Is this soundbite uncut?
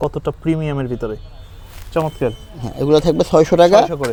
yes; 0 cuts

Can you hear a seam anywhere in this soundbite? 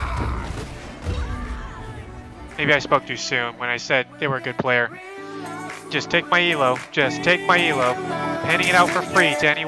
no; 0 cuts

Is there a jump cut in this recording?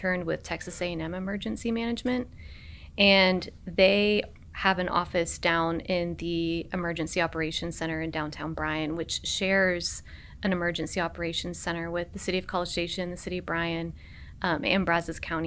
yes; 1 cut; at 4.4 s

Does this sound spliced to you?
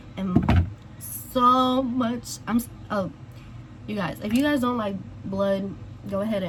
no; 0 cuts

